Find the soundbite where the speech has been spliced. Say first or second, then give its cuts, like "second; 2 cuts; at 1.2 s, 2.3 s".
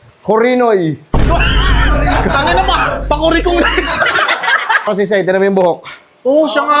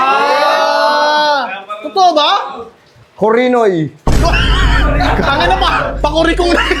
first; 1 cut; at 4.9 s